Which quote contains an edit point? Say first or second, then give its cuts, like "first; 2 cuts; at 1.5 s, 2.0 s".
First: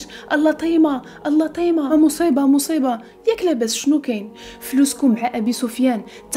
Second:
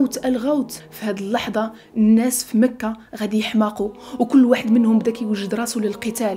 first; 1 cut; at 1.9 s